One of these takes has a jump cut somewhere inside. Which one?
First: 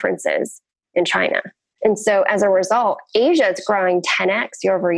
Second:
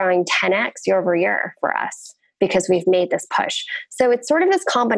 first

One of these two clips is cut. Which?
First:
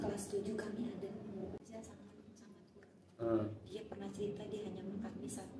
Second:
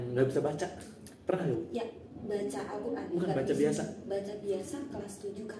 first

